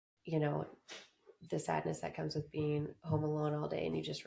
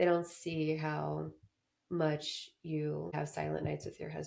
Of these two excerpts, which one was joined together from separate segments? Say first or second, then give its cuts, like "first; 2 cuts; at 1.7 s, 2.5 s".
second; 1 cut; at 3.1 s